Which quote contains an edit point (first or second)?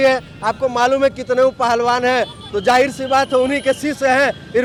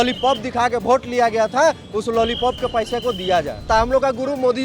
second